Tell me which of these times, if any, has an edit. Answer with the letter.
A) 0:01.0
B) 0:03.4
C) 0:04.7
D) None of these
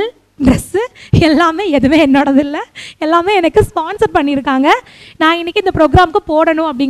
D